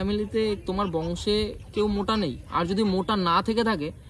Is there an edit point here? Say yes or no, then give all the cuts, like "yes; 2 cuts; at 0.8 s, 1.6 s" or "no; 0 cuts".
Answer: no; 0 cuts